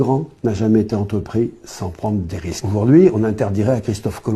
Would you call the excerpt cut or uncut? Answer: cut